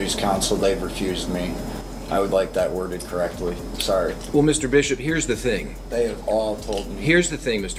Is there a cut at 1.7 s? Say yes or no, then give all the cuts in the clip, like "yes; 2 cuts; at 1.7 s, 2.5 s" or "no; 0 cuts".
no; 0 cuts